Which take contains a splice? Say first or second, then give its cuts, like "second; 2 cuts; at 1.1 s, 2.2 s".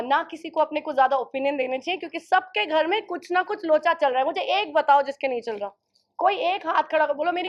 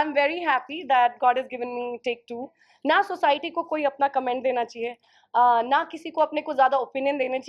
second; 1 cut; at 2.6 s